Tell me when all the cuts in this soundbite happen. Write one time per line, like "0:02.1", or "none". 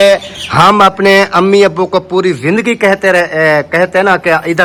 none